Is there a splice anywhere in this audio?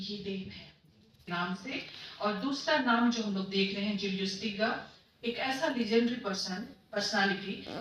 yes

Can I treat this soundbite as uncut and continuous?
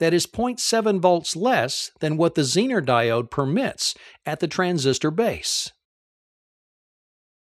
yes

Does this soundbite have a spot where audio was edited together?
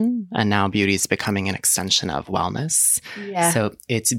no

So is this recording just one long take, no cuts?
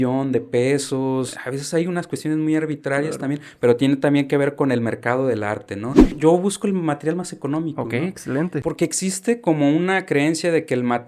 no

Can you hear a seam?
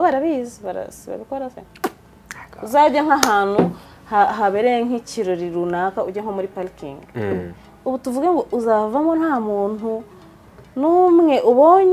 no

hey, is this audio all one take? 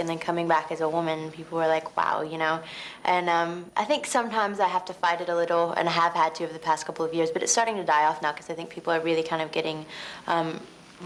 yes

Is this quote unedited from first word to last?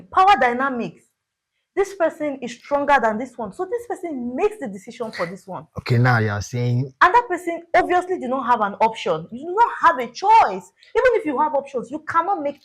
yes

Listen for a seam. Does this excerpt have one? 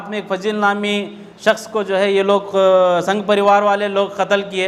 no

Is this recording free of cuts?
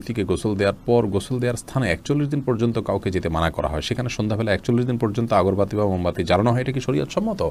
yes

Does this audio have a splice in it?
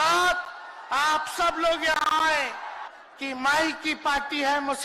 yes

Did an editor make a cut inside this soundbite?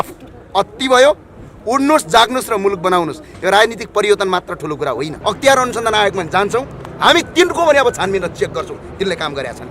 yes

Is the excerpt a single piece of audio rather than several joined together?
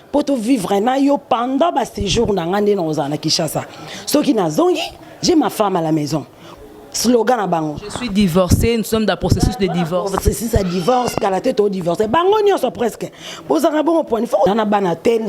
no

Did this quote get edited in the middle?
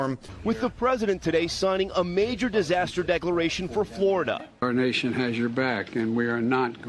no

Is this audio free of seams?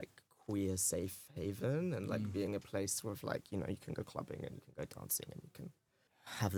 yes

